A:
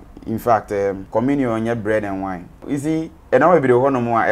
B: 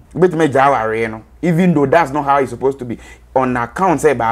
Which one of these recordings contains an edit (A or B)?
A